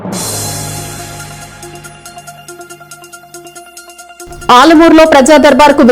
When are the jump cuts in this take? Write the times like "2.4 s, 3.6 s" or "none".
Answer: 3.5 s